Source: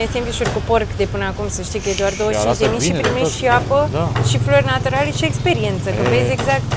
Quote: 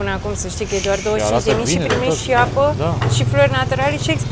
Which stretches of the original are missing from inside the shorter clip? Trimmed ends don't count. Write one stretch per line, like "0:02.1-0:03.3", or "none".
none